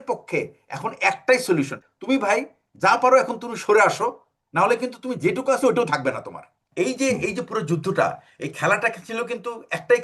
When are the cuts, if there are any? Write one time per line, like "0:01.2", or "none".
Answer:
0:01.8
0:06.6